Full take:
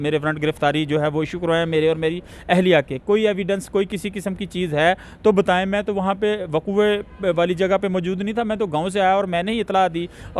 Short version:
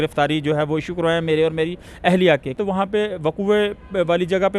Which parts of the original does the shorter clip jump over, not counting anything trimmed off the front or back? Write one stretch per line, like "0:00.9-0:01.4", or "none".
0:03.0-0:05.8